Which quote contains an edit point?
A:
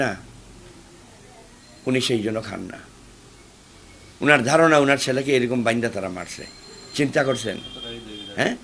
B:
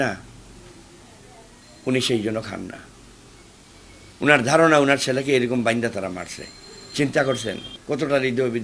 B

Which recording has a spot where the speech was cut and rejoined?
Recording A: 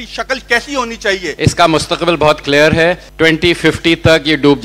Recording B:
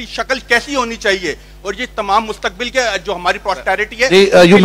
A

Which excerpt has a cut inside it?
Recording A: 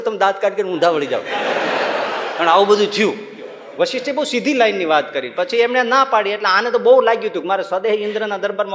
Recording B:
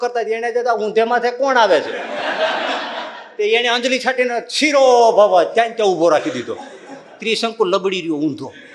A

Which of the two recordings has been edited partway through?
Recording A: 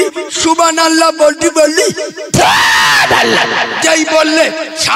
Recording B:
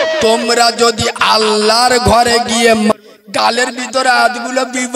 B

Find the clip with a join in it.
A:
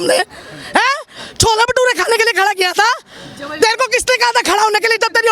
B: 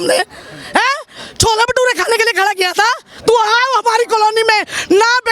B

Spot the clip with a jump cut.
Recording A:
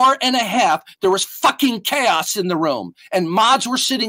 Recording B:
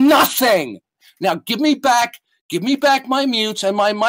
B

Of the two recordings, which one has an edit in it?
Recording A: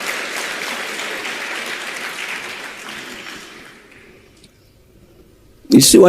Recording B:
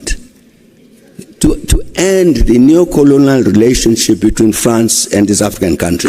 A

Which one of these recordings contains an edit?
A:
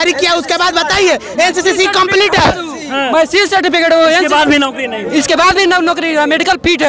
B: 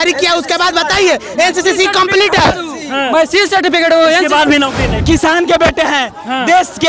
B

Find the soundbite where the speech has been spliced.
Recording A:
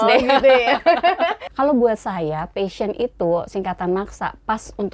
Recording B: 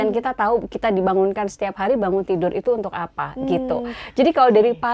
A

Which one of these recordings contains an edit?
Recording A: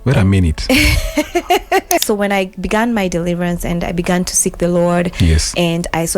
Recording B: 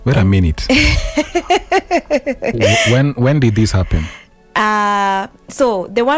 A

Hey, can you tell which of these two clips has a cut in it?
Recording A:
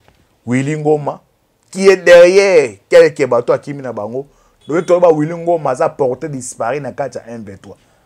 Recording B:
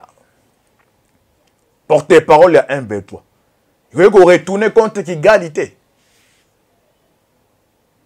A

